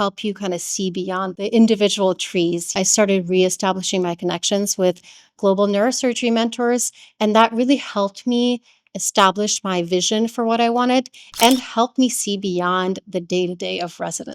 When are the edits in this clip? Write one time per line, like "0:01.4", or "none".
0:01.4
0:02.7

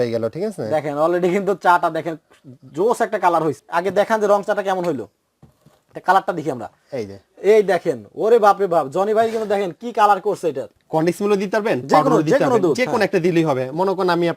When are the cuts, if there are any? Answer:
0:03.6
0:10.7

